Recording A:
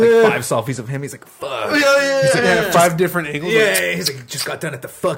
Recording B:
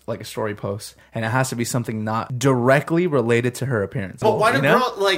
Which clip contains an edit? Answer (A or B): B